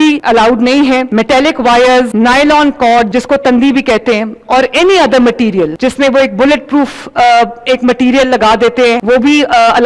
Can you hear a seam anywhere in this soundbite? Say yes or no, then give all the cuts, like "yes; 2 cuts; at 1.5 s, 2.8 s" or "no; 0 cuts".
no; 0 cuts